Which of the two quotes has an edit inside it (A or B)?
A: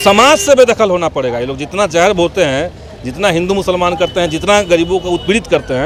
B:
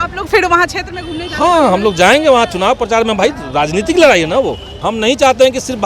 B